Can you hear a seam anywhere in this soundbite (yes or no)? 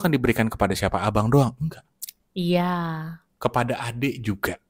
no